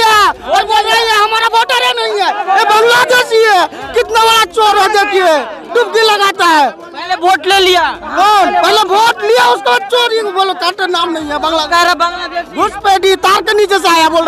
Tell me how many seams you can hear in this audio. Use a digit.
0